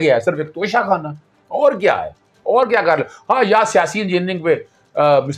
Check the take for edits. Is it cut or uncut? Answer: uncut